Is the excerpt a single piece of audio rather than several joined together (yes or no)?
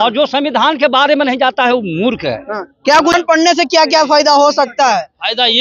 no